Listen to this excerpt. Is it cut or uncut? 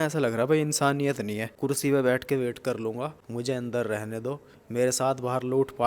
cut